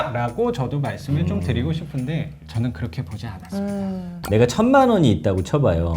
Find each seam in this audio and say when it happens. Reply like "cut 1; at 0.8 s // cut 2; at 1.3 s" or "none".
cut 1; at 2.4 s // cut 2; at 4.1 s